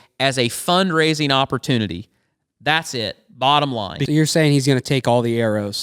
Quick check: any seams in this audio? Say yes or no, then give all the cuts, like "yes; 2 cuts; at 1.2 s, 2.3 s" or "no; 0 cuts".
yes; 1 cut; at 4.0 s